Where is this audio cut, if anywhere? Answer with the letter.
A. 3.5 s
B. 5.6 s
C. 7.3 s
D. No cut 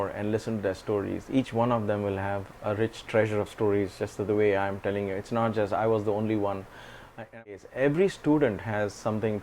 C